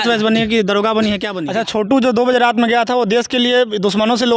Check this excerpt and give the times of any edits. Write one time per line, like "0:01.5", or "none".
0:01.3